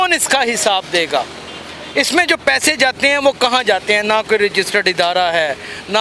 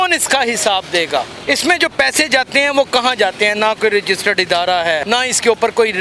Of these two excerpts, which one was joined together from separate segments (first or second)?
second